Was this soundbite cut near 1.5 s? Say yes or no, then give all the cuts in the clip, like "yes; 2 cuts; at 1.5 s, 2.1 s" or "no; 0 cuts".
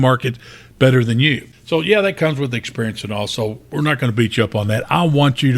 yes; 1 cut; at 1.5 s